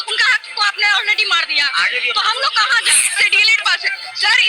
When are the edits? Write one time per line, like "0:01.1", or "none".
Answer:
0:03.3